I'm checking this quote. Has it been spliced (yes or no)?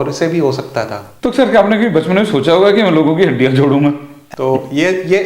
yes